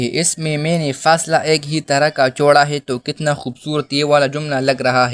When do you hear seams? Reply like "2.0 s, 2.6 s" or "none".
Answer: none